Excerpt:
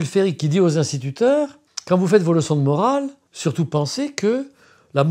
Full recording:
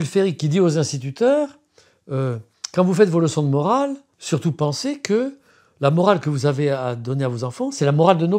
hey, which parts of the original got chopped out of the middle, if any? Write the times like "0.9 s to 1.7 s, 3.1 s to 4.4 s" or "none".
1.7 s to 2.5 s